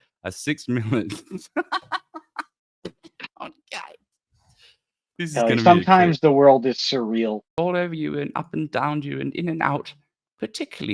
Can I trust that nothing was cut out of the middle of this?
no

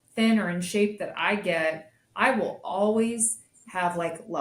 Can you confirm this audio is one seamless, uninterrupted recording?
yes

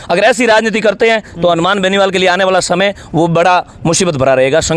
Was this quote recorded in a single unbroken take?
yes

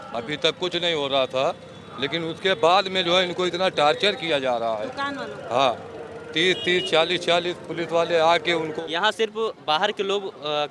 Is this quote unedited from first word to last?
no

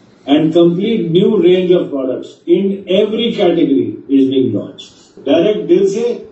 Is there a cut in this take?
yes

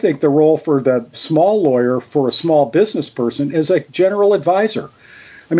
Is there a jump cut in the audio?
yes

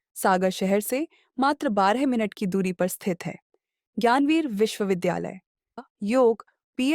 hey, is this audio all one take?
no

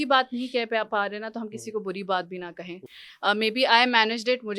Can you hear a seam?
no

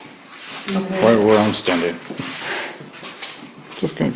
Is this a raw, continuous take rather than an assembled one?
yes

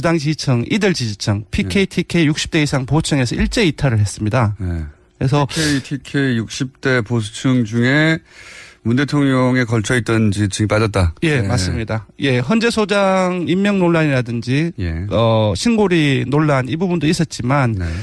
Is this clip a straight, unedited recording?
yes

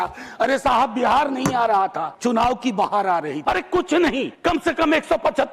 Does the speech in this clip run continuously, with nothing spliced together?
no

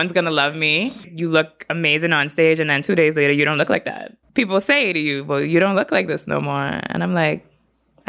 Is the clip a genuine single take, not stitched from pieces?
no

